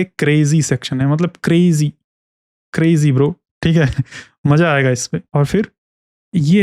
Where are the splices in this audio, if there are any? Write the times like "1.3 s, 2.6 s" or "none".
5.3 s